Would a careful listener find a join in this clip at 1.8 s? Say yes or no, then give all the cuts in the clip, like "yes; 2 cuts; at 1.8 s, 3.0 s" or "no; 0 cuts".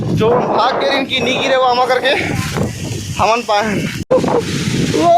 no; 1 cut; at 4.1 s